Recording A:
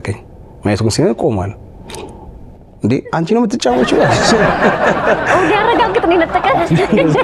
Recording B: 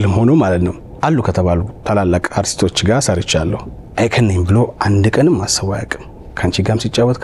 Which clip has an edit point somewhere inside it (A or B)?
B